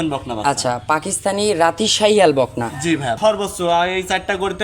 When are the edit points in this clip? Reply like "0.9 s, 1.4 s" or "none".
3.2 s